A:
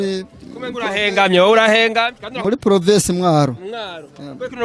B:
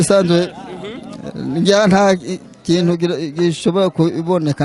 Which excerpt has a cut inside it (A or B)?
A